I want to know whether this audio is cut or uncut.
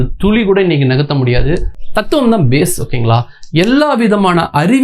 cut